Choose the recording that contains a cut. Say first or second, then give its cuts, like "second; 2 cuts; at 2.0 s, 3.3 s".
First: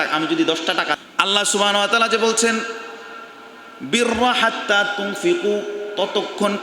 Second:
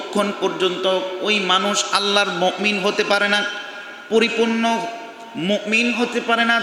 first; 1 cut; at 1.0 s